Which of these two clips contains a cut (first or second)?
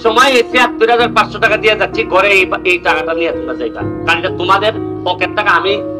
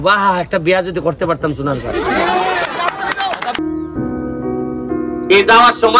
second